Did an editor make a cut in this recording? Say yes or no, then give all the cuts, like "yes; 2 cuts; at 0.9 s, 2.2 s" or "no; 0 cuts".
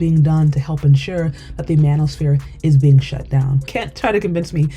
yes; 1 cut; at 3.7 s